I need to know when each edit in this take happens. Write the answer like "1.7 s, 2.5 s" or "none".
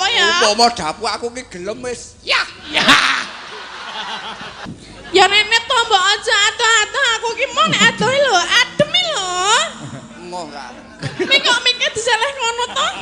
4.7 s